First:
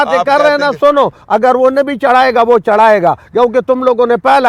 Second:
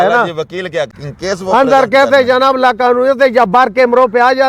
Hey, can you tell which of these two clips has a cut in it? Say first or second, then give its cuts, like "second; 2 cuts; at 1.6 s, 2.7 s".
second; 1 cut; at 1.1 s